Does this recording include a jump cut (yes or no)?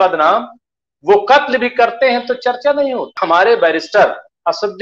yes